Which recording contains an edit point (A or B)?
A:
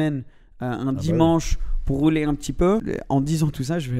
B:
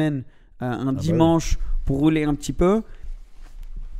A